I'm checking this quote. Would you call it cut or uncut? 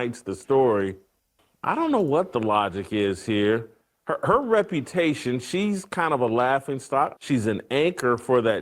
cut